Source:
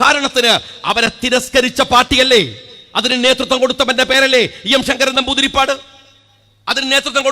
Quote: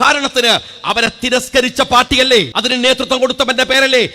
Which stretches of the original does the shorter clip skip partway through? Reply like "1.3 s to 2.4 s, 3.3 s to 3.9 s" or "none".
2.6 s to 3.0 s